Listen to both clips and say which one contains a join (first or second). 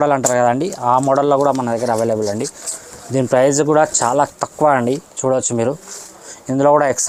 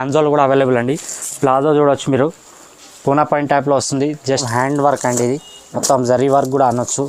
second